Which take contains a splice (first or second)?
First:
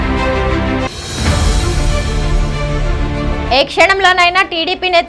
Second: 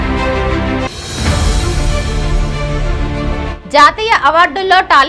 first